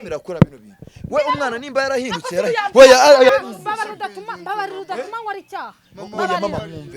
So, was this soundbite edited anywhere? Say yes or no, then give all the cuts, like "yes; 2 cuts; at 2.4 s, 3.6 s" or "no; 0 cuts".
yes; 1 cut; at 3.3 s